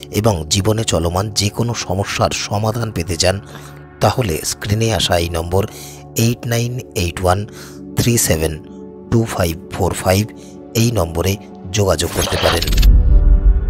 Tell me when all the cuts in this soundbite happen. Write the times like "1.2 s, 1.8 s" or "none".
12.6 s